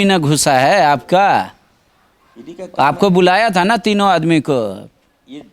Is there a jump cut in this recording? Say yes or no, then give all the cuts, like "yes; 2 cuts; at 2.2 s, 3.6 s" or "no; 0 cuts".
no; 0 cuts